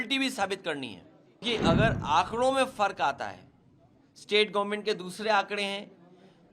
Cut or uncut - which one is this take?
cut